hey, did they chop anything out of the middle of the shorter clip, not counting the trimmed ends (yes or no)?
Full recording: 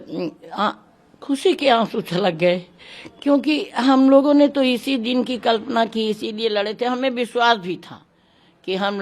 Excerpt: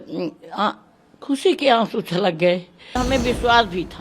yes